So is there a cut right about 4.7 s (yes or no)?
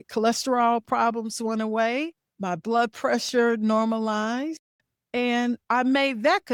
no